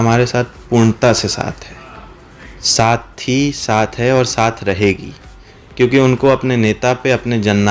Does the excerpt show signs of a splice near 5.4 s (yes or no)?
no